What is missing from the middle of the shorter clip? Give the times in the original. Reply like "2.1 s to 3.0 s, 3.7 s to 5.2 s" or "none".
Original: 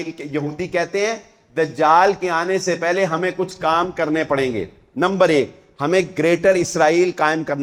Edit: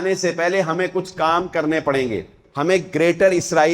4.8 s to 5.6 s